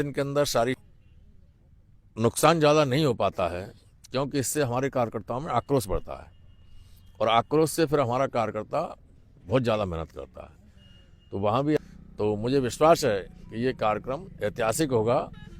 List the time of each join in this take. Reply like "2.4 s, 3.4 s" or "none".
0.8 s, 11.8 s